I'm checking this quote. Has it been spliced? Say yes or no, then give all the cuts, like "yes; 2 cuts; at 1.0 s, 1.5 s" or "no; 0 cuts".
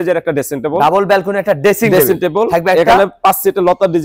no; 0 cuts